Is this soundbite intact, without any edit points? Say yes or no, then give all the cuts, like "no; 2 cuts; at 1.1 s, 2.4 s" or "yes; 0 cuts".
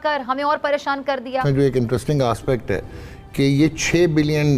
no; 1 cut; at 1.4 s